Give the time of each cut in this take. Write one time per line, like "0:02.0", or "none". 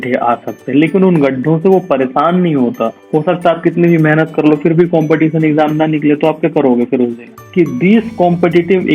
0:03.0
0:07.2